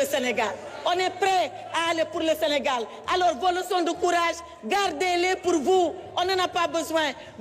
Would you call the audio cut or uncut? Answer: uncut